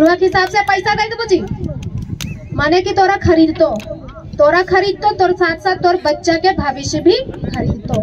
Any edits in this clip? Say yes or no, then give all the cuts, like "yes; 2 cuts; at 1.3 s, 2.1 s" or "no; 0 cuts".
no; 0 cuts